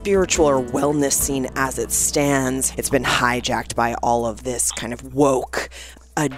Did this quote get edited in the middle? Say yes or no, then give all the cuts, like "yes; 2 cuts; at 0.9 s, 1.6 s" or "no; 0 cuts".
yes; 1 cut; at 2.7 s